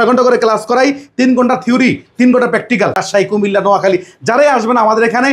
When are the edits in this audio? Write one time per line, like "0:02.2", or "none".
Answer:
0:03.0